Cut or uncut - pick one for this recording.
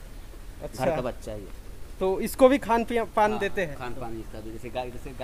uncut